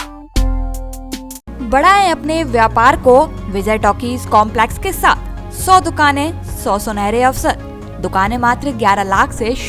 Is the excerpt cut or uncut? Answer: uncut